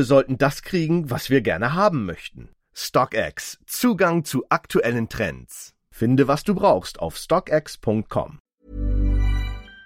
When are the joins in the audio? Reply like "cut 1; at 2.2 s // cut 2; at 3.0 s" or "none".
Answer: cut 1; at 8.4 s